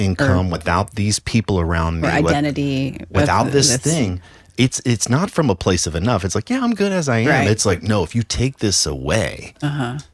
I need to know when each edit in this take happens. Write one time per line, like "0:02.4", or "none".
none